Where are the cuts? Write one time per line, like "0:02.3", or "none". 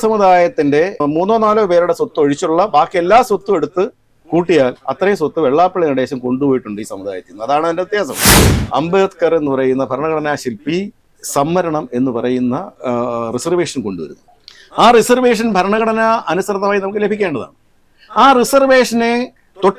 0:08.4